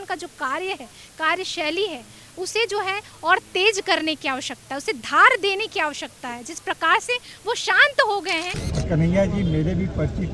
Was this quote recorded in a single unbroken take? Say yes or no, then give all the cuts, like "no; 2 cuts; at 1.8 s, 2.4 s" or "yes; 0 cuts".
no; 1 cut; at 8.6 s